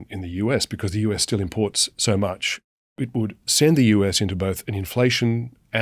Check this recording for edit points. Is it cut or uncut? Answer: cut